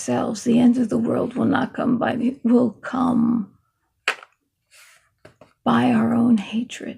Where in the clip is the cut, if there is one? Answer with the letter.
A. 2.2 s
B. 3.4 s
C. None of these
A